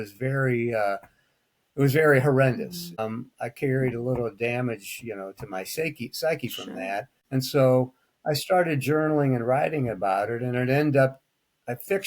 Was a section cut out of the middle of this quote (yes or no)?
yes